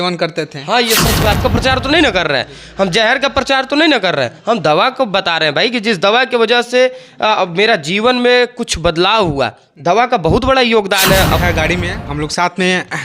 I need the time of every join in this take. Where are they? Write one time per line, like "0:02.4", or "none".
0:01.4
0:11.3